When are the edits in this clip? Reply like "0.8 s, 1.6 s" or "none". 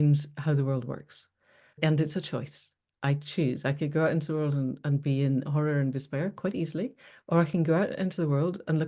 1.8 s